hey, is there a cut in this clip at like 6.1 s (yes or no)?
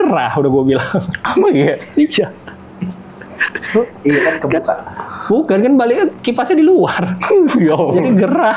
no